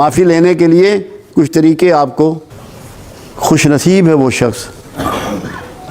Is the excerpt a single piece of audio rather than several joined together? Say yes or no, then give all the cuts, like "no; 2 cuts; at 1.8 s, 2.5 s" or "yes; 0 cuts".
no; 1 cut; at 2.5 s